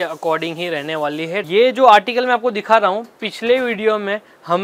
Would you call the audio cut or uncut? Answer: cut